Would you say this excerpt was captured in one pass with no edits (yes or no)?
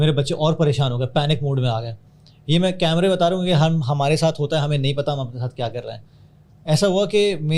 yes